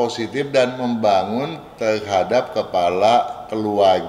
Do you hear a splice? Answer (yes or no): no